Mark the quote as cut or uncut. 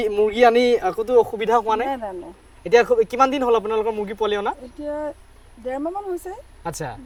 uncut